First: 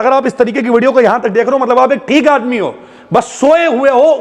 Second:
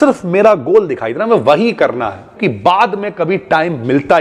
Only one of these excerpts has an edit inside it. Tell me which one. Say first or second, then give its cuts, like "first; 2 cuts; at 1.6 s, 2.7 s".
second; 1 cut; at 2.4 s